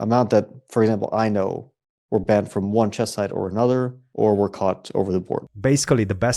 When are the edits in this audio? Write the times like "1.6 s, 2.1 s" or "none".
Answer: 4.0 s, 5.5 s